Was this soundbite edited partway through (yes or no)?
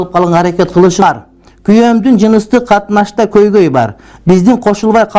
yes